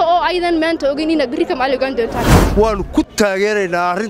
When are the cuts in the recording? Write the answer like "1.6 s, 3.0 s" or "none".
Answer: 2.4 s